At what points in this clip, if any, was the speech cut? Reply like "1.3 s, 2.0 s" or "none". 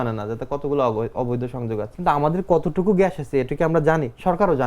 1.9 s